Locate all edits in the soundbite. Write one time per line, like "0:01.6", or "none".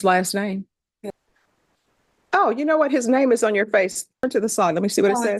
0:01.1

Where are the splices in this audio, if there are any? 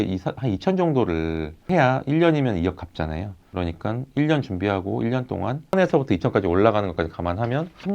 0:05.7

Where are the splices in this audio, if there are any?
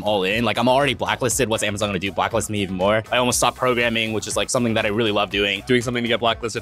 0:03.0
0:05.6

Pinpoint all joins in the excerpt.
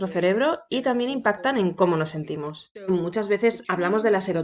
0:02.9

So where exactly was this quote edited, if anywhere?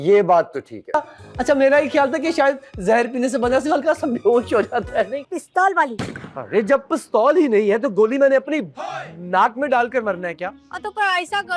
0:01.0
0:05.2

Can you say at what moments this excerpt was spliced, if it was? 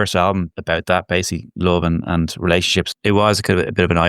0:02.9

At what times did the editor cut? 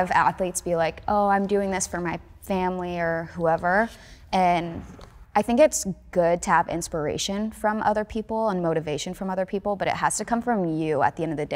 none

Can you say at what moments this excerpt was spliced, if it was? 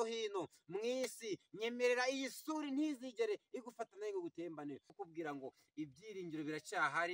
0:05.0

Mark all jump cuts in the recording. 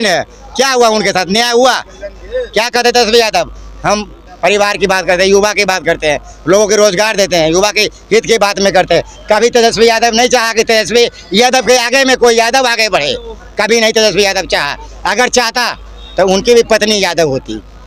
none

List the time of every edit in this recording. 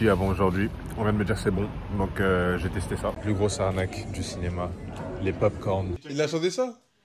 0:00.8
0:03.2
0:06.0

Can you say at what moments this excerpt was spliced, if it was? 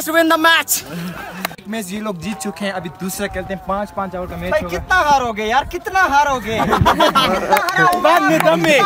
0:01.6

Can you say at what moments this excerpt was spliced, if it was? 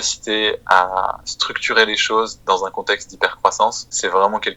none

